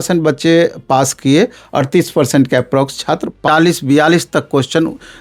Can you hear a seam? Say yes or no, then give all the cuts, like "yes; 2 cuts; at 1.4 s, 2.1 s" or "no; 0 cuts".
yes; 1 cut; at 3.4 s